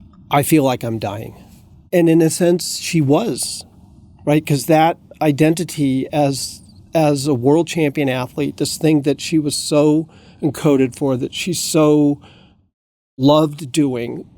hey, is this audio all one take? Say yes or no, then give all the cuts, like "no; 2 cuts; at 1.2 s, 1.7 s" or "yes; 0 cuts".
no; 1 cut; at 1.8 s